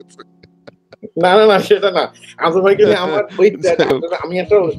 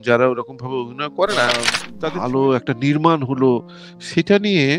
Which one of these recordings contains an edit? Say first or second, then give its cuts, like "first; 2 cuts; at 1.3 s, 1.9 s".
second; 1 cut; at 1.8 s